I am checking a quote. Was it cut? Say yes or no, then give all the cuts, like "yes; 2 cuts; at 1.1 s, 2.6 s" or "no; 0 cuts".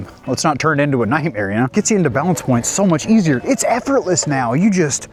no; 0 cuts